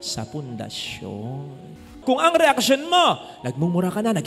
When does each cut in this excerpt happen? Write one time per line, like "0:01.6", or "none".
0:01.9